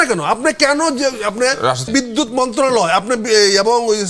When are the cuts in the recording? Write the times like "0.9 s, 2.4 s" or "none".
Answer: 1.9 s